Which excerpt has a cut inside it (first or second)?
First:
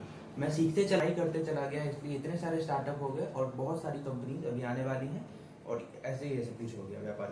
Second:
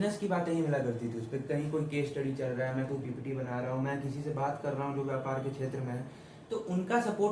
first